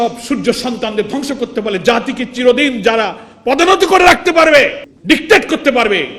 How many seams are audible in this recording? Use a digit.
1